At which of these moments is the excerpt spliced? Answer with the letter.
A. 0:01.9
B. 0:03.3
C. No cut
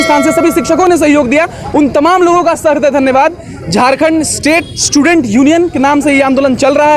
C